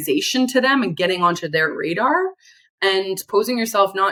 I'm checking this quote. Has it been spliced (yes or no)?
no